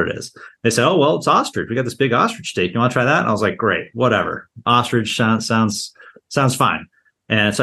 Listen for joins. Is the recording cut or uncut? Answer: uncut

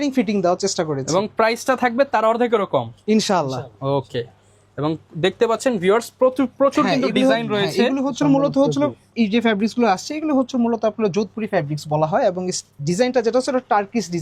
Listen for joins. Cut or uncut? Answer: uncut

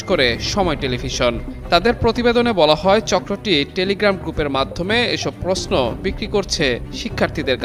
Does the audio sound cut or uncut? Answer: uncut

